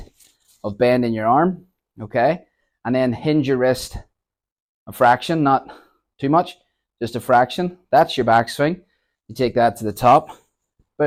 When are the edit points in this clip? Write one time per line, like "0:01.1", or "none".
none